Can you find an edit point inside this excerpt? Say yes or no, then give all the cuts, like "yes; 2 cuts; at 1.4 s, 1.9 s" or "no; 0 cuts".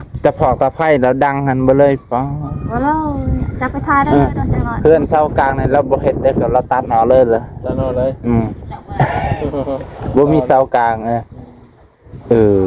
no; 0 cuts